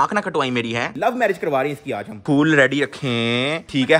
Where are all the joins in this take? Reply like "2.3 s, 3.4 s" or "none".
1.0 s